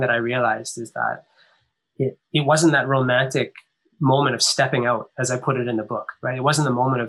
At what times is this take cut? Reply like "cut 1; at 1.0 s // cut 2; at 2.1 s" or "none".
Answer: none